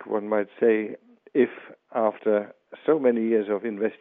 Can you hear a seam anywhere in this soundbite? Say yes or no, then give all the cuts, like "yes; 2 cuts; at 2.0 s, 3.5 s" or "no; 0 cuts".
no; 0 cuts